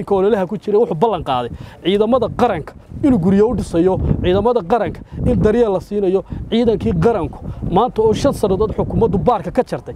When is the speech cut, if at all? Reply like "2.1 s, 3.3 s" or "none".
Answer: none